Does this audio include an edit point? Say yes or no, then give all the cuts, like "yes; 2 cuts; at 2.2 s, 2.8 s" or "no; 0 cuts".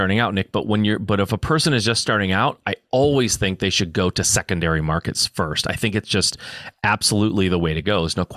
no; 0 cuts